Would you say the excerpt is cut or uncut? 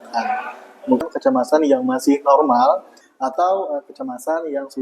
cut